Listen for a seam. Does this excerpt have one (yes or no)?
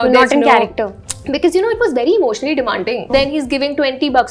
yes